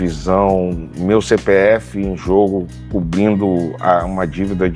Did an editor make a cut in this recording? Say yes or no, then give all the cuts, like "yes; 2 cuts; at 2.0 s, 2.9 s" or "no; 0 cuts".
no; 0 cuts